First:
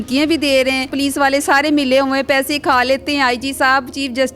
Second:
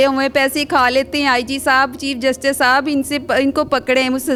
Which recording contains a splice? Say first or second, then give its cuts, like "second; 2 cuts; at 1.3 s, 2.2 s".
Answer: first; 1 cut; at 0.9 s